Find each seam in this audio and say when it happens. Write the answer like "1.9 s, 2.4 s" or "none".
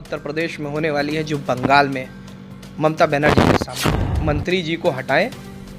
4.1 s

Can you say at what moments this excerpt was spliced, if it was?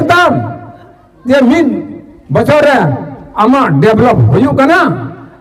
none

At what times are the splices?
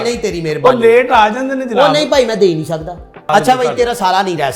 3.3 s

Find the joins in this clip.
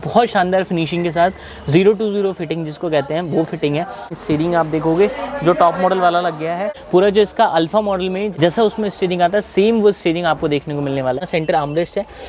4.1 s, 6.7 s, 8.3 s, 11.2 s

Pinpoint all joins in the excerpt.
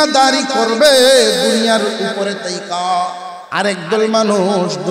3.3 s

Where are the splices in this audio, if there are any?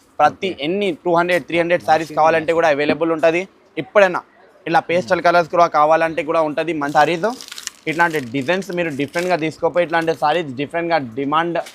6.9 s

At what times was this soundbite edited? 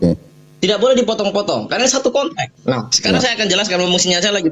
2.5 s

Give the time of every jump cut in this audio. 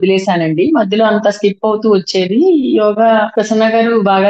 3.3 s

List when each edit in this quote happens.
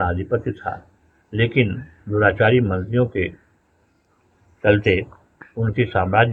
none

